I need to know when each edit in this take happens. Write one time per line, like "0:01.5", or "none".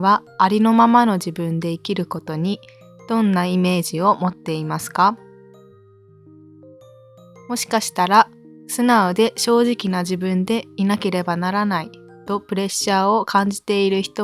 0:05.7
0:07.4